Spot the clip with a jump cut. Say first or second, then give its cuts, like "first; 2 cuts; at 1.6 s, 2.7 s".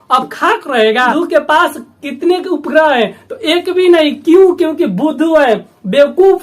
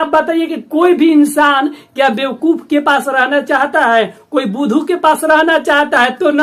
first; 1 cut; at 1.1 s